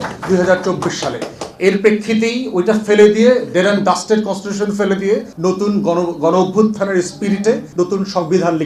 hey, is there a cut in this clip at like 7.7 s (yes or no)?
yes